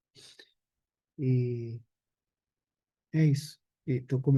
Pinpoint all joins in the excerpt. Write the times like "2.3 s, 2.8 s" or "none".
none